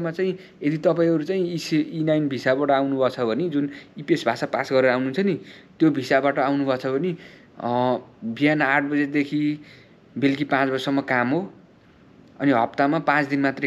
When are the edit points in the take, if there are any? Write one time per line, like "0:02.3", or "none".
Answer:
none